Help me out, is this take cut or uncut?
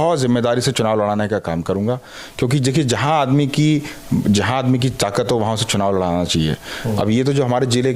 uncut